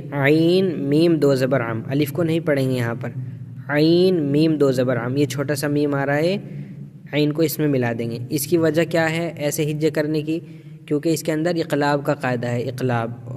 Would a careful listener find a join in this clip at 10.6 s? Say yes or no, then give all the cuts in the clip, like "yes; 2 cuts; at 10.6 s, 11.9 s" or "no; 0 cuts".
no; 0 cuts